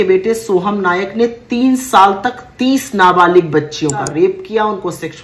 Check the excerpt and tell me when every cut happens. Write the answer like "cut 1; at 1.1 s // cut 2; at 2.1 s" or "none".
cut 1; at 4.1 s